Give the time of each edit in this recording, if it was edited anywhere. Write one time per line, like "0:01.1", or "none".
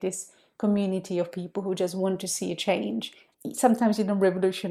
0:03.2